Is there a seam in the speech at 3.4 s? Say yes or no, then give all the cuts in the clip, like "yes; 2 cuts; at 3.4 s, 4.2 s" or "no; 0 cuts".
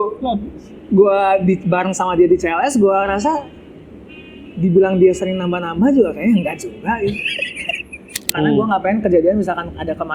no; 1 cut; at 8.2 s